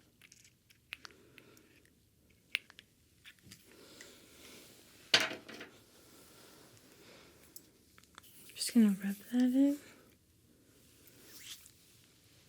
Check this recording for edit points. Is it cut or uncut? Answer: uncut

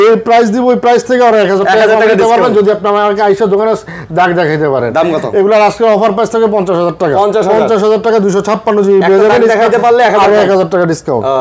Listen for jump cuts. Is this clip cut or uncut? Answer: uncut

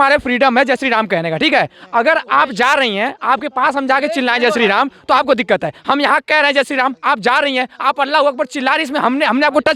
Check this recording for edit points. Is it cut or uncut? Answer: uncut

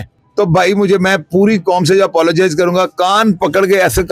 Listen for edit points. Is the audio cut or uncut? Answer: uncut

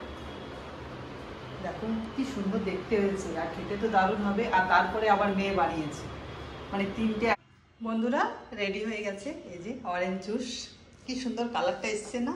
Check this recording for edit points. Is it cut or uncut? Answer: cut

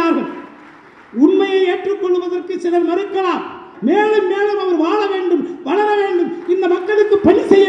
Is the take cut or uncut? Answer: cut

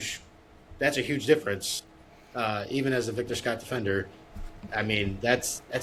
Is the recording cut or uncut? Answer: uncut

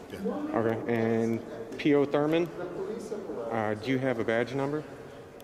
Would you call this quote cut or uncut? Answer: uncut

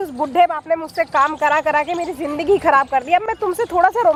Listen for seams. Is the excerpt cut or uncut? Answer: uncut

